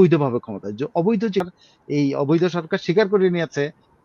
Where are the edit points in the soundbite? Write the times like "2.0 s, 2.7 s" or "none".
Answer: 1.6 s